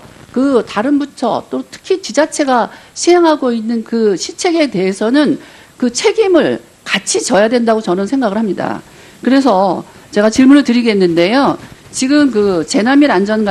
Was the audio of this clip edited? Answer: no; 0 cuts

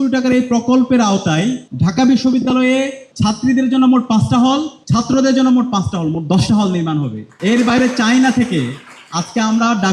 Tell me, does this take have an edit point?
yes; 4 cuts; at 1.7 s, 3.0 s, 4.8 s, 7.2 s

